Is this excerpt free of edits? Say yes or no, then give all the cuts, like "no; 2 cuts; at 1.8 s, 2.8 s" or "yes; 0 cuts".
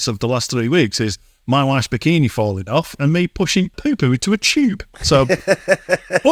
yes; 0 cuts